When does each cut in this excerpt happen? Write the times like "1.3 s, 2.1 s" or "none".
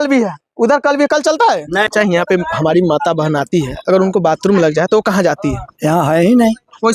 1.9 s